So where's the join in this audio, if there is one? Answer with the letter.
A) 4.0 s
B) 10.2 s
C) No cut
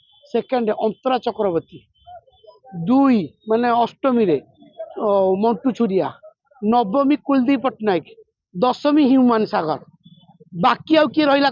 C